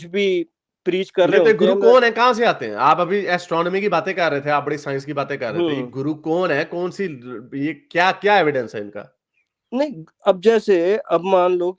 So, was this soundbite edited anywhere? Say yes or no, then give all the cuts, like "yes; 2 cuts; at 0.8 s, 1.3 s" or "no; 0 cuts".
no; 0 cuts